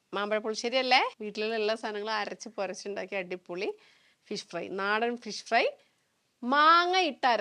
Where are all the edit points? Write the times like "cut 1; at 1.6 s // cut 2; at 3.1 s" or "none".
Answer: none

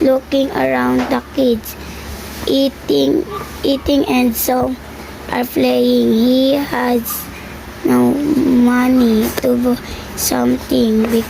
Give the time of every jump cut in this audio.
cut 1; at 6.2 s

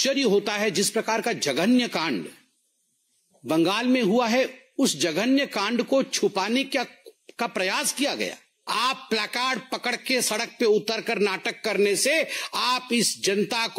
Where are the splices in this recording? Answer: cut 1; at 8.5 s

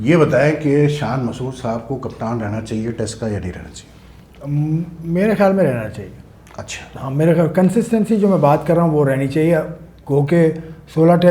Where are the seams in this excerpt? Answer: none

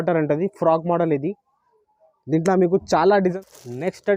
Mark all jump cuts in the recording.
cut 1; at 3.2 s

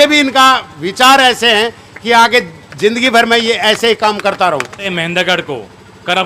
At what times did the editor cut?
cut 1; at 4.9 s

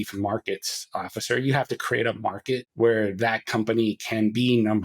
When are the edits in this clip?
cut 1; at 2.7 s

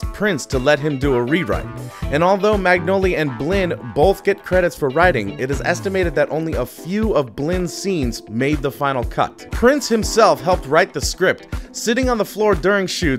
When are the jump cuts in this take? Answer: cut 1; at 12.0 s

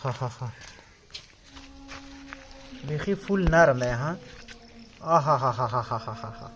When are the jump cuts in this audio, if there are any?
cut 1; at 1.6 s

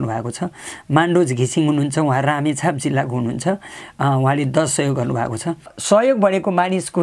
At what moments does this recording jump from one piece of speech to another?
cut 1; at 5.7 s

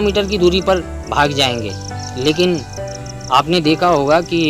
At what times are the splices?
none

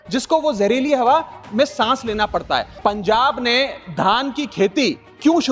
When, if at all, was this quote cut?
cut 1; at 2.7 s

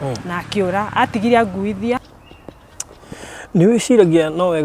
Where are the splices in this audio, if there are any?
cut 1; at 2.0 s

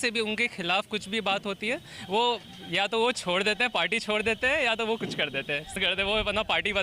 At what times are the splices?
cut 1; at 5.7 s

